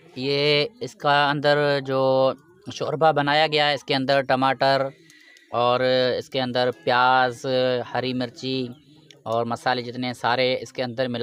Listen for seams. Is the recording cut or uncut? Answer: uncut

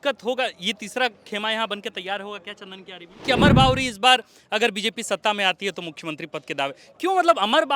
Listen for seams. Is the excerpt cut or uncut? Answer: cut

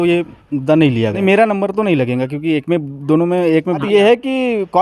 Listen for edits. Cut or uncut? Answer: cut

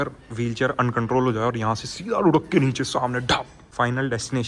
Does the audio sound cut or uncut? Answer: cut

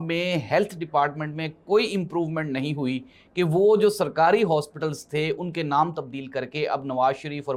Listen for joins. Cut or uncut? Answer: uncut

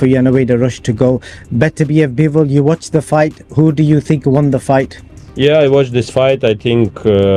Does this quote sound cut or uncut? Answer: uncut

